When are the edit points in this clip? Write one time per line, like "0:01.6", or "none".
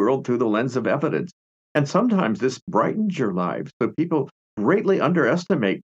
0:04.4